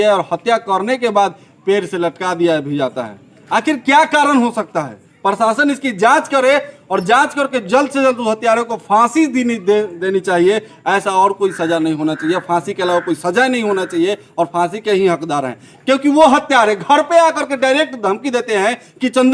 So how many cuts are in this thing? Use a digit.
0